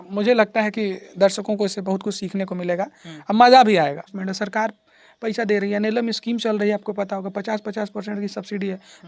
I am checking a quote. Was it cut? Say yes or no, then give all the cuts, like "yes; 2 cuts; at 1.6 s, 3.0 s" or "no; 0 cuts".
yes; 1 cut; at 4.1 s